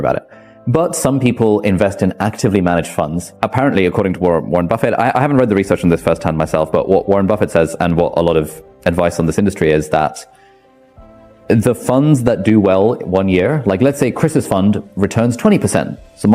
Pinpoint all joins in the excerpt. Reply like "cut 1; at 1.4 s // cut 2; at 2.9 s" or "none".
cut 1; at 3.3 s